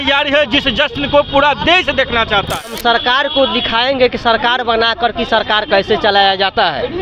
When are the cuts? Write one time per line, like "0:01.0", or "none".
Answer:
0:02.7